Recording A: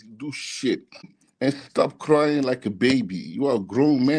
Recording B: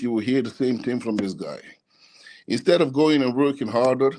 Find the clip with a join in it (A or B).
A